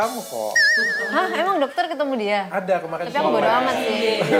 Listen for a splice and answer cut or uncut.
uncut